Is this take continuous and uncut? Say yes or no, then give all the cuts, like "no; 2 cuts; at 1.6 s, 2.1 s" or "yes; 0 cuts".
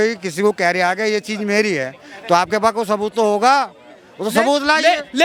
yes; 0 cuts